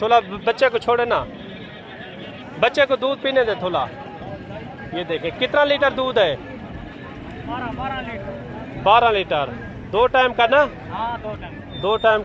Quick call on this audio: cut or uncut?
uncut